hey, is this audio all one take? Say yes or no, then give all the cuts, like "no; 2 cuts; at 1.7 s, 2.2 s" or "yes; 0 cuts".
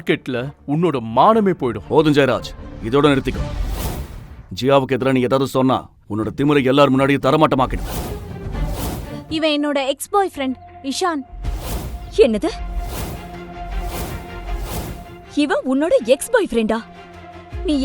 no; 1 cut; at 9.3 s